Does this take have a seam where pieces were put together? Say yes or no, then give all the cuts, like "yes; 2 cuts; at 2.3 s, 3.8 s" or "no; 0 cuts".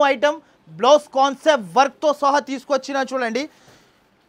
no; 0 cuts